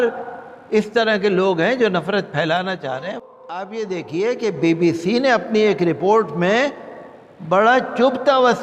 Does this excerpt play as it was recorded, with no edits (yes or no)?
no